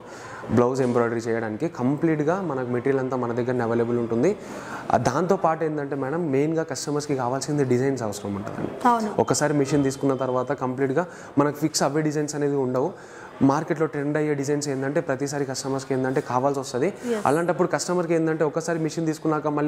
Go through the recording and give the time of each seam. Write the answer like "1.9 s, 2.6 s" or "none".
none

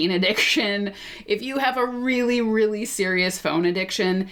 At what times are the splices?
none

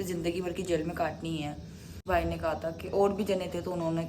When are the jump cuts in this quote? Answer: 1.9 s

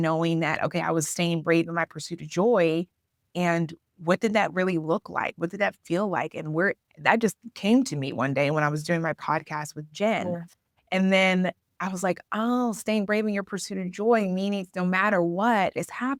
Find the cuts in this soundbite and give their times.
none

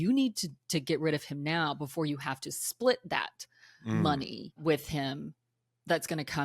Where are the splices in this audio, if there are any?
4.6 s

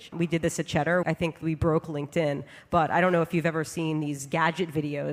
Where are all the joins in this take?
1.2 s

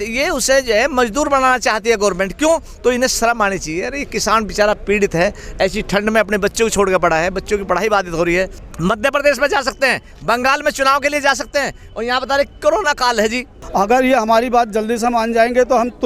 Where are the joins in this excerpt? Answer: 2.7 s, 8.6 s, 13.6 s

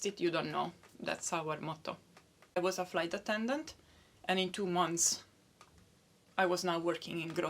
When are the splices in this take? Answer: 2.6 s

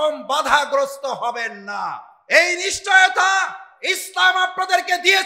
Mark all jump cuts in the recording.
2.1 s

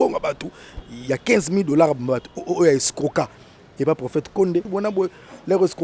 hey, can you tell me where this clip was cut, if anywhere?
4.7 s

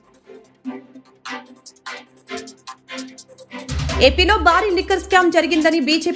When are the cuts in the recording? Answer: 1.4 s

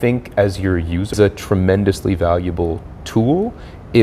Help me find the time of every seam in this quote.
1.1 s

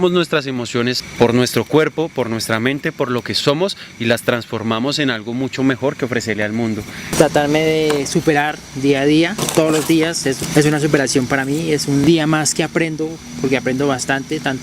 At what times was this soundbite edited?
1.0 s, 7.1 s, 9.4 s, 12.0 s

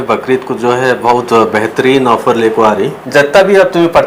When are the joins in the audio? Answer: 3.0 s

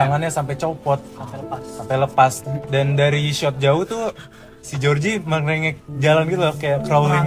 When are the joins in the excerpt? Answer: 2.5 s

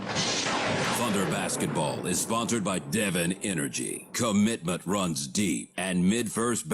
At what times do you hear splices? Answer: 0.9 s

